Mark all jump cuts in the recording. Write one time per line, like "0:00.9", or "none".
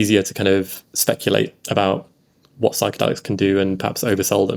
none

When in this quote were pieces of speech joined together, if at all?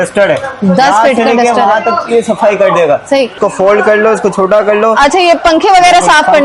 0:03.4

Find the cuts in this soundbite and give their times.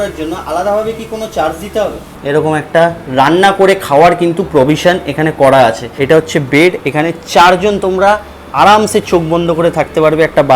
0:02.1
0:05.9

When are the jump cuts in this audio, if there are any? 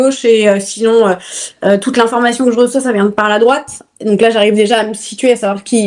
none

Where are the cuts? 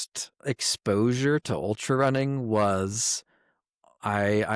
none

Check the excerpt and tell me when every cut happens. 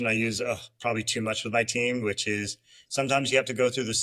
none

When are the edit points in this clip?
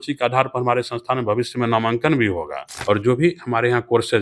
0:02.7

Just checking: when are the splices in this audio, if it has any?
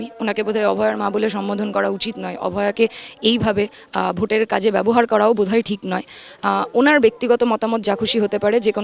none

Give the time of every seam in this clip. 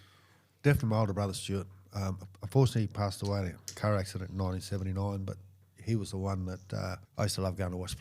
0:07.0

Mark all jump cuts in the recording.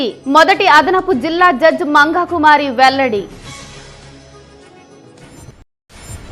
none

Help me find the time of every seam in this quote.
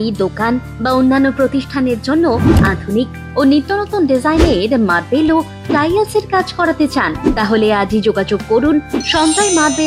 none

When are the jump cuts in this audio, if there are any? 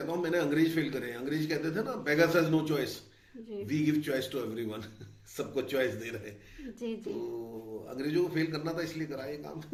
none

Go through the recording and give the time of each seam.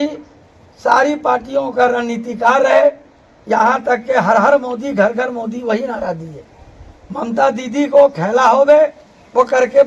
none

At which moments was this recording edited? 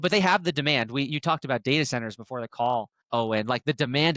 0:03.0

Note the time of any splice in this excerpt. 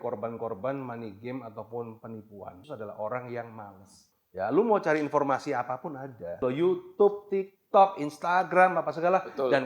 0:02.6
0:04.2
0:06.4

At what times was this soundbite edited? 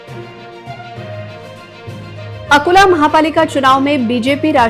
none

